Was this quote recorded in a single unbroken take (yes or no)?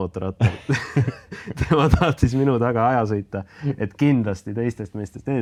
yes